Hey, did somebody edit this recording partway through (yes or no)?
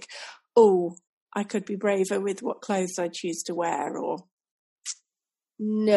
no